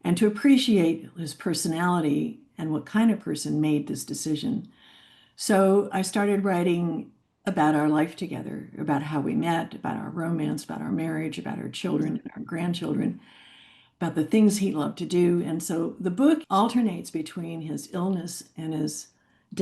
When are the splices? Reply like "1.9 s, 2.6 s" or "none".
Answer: 16.4 s